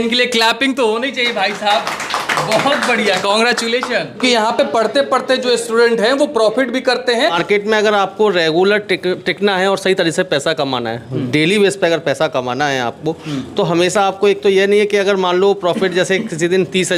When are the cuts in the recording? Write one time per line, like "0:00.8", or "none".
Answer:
0:04.1
0:07.4